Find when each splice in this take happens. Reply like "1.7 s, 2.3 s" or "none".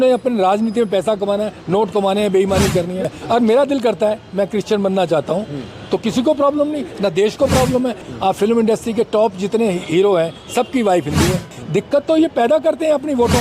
3.1 s, 8.1 s, 11.5 s